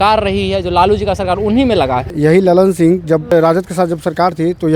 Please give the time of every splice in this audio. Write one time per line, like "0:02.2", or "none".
0:02.1
0:03.3